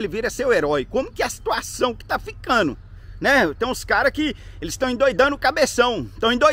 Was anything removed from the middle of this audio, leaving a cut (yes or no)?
no